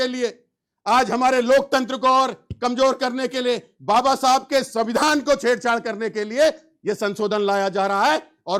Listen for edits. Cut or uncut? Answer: uncut